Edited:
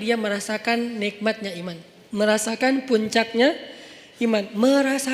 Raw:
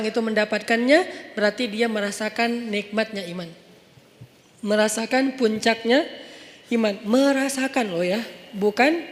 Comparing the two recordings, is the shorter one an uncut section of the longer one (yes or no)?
no